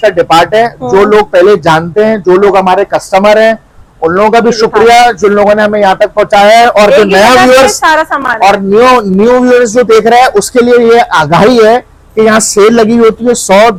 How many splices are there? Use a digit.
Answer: 0